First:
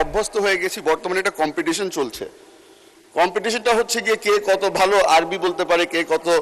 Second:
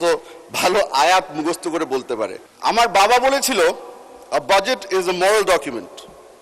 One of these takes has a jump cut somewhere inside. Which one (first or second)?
second